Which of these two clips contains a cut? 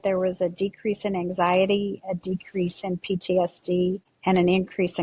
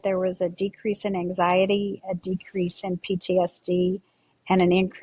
first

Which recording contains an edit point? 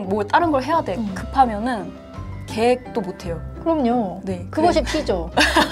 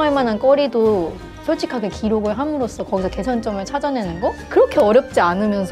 second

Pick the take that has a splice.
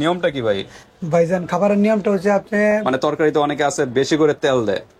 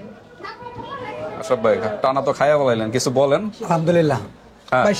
first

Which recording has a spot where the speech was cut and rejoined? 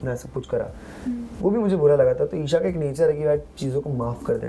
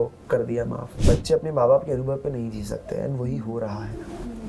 second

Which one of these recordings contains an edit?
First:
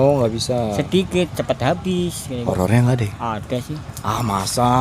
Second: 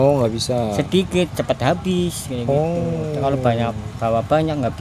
first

